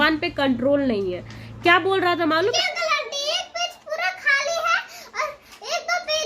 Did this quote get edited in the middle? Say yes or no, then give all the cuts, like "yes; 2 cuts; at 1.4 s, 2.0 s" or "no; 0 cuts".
yes; 1 cut; at 2.6 s